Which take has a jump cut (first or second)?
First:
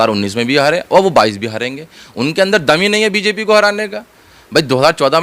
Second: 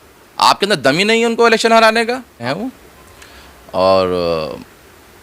second